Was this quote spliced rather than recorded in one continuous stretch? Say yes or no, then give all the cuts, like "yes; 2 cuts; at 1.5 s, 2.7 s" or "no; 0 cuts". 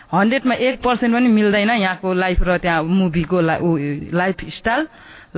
no; 0 cuts